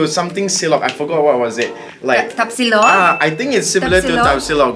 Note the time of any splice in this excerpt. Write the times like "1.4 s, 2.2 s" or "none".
none

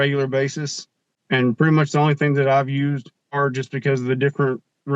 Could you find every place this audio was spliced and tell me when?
1.1 s, 3.3 s

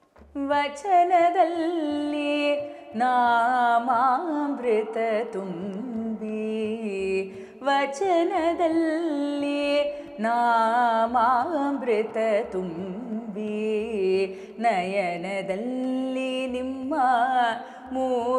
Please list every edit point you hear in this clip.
none

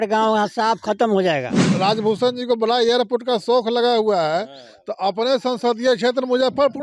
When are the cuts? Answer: 1.7 s

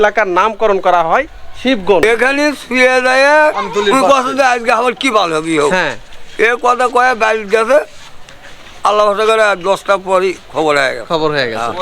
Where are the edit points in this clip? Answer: 2.0 s

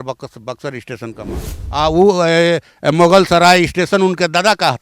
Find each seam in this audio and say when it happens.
1.6 s

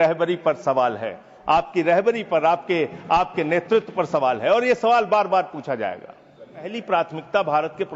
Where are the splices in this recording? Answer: 6.7 s

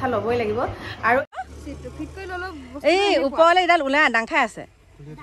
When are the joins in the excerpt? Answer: 1.3 s

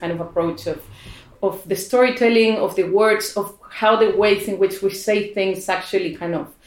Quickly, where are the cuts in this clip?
1.3 s

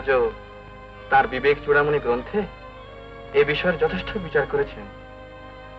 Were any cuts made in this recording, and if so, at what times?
none

